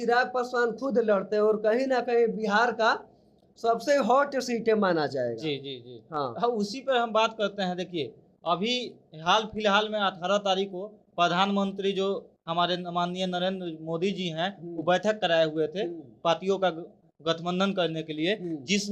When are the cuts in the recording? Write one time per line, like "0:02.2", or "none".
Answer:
none